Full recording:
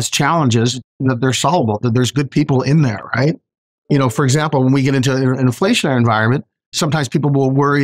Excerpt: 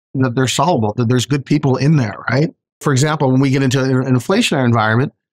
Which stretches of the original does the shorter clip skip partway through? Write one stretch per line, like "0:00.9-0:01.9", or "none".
0:03.7-0:04.1